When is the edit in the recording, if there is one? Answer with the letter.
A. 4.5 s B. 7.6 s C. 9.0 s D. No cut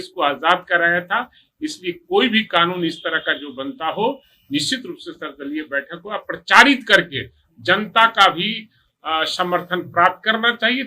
D